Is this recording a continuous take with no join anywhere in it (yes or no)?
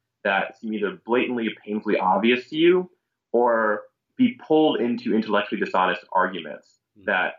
yes